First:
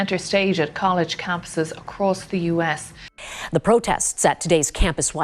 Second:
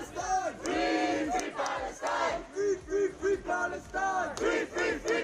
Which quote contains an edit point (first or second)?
first